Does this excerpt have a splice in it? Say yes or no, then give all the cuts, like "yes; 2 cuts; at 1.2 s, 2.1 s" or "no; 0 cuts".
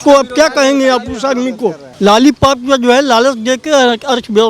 yes; 1 cut; at 1.9 s